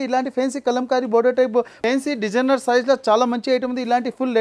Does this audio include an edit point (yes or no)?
yes